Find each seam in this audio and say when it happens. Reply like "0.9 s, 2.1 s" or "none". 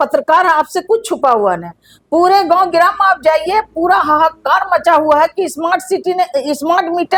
none